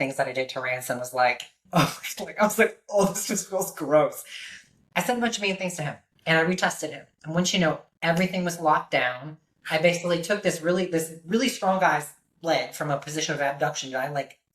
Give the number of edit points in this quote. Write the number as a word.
two